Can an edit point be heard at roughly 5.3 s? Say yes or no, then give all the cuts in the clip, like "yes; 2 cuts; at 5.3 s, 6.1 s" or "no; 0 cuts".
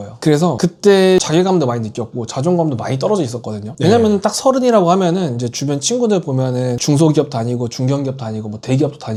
no; 0 cuts